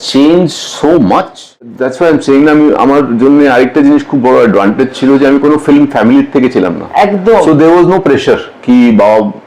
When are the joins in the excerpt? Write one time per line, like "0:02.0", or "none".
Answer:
0:01.8